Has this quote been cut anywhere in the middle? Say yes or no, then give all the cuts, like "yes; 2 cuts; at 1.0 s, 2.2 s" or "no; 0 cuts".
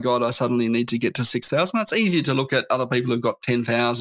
no; 0 cuts